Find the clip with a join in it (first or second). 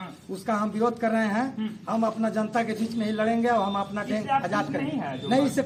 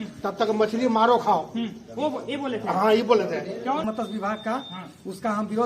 second